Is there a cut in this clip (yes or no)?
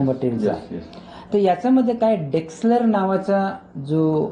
no